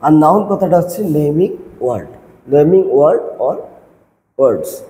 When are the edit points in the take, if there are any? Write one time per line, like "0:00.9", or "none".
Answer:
none